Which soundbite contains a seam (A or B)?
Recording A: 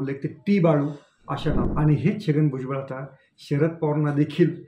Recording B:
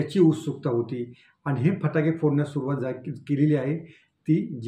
A